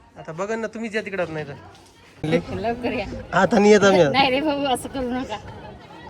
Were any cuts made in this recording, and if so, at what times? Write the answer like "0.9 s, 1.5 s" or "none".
2.1 s